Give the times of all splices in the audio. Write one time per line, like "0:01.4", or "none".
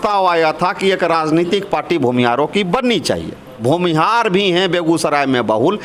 0:03.4